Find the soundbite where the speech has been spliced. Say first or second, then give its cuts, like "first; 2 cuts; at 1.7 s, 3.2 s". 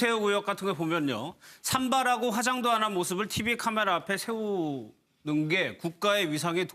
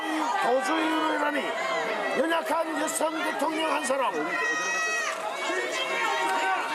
first; 1 cut; at 3.8 s